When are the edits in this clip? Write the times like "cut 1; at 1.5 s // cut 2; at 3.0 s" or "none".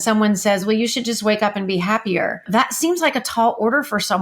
cut 1; at 2.5 s